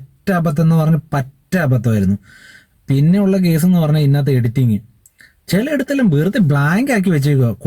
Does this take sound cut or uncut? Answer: uncut